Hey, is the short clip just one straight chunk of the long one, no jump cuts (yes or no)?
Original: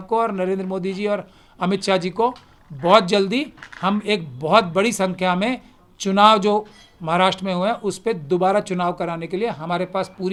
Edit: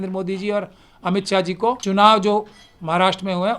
no